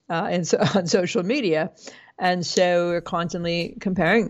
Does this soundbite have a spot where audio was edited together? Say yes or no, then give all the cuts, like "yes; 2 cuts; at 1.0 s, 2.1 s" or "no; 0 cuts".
no; 0 cuts